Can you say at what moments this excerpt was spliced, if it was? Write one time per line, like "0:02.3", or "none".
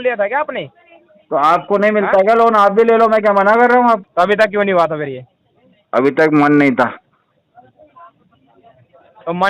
0:04.1